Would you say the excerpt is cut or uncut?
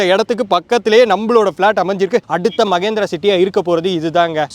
cut